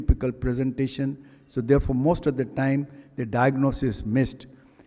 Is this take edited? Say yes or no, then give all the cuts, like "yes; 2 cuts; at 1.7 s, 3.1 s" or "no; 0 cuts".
no; 0 cuts